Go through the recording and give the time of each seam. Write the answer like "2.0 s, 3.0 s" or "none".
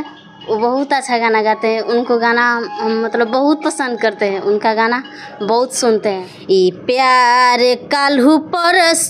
6.3 s